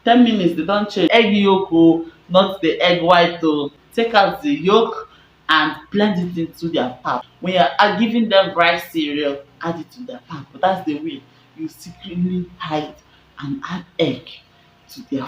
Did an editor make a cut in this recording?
yes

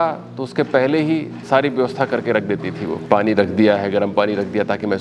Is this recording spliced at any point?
yes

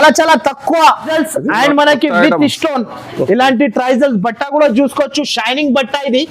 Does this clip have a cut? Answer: yes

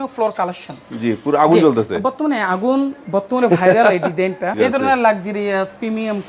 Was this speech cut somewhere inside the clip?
yes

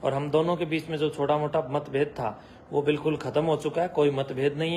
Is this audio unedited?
yes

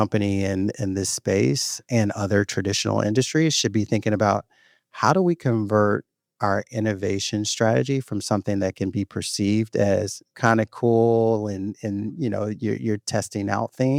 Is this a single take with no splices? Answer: yes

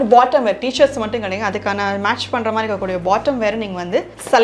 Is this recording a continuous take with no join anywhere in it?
yes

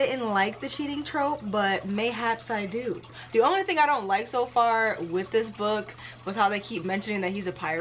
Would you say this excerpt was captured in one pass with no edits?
yes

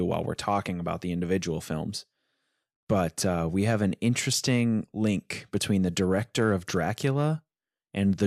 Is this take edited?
no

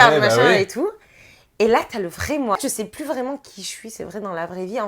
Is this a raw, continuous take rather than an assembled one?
no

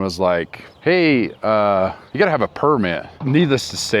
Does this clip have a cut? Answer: yes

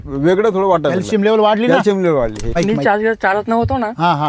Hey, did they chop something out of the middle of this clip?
yes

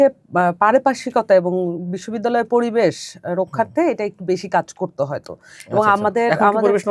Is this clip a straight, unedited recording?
yes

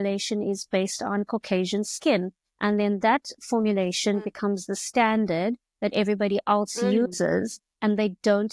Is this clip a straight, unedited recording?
yes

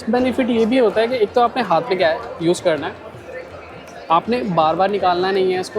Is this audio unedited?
yes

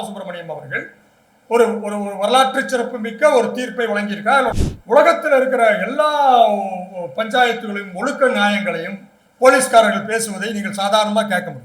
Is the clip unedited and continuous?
no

